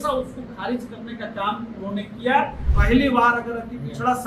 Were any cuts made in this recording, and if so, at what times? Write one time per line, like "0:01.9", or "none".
0:02.6